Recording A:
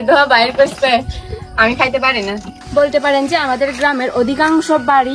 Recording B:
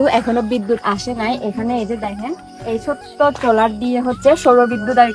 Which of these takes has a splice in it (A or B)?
A